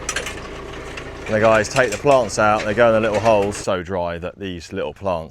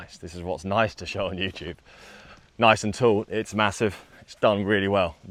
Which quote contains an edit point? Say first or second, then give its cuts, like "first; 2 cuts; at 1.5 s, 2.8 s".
first; 1 cut; at 3.6 s